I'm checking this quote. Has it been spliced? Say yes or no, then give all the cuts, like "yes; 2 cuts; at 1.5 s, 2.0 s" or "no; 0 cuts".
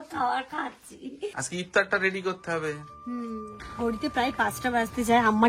yes; 1 cut; at 1.3 s